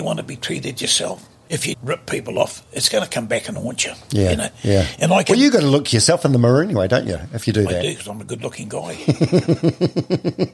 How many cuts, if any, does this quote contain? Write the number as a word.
one